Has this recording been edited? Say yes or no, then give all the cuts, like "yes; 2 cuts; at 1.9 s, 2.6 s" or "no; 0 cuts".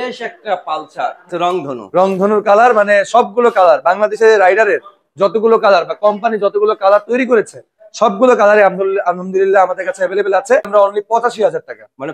yes; 2 cuts; at 1.3 s, 10.7 s